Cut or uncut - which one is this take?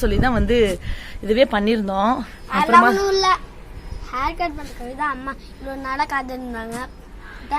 cut